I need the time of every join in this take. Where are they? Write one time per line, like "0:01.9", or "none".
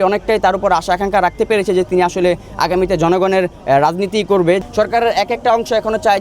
0:04.6

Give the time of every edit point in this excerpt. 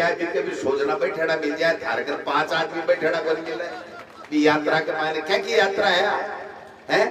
none

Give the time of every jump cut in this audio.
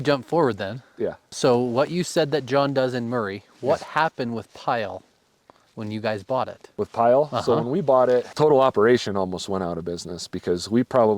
0:08.3

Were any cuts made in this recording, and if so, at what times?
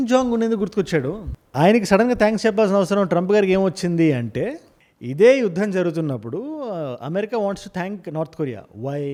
none

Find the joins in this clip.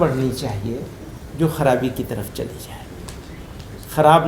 none

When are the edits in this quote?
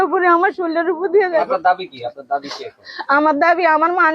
0:01.4

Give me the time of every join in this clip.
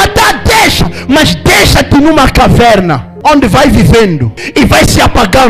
0:03.1
0:04.4

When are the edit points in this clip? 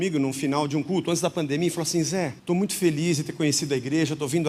0:02.4

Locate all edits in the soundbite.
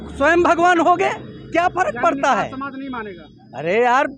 none

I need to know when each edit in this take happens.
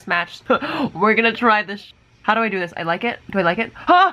none

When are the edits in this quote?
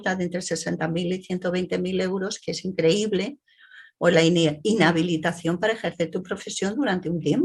none

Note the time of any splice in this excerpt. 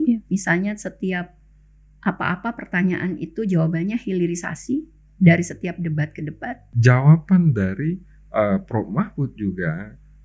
0:06.6

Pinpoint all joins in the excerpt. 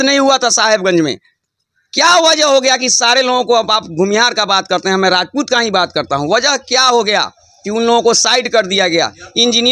none

